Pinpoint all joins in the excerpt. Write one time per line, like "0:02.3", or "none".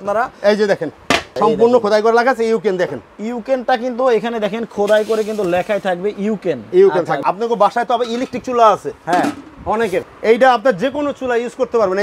0:01.3
0:07.2
0:10.1